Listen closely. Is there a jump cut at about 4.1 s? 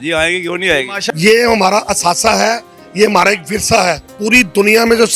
yes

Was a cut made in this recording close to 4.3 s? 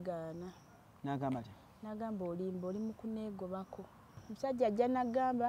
yes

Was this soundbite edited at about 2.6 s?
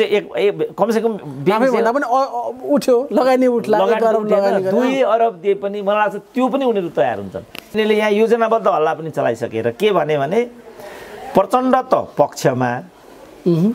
no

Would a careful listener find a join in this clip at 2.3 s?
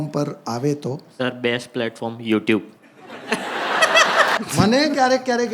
no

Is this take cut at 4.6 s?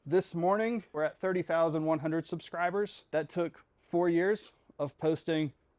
no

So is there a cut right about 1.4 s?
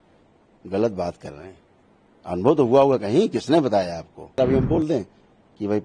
no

